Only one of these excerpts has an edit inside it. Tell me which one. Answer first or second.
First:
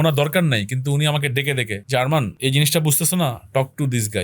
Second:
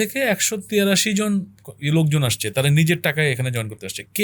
first